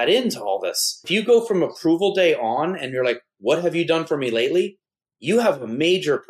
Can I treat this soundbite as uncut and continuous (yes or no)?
no